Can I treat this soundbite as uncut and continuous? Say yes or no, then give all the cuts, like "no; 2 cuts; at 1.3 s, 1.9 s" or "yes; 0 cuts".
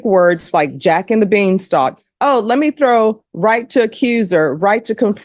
yes; 0 cuts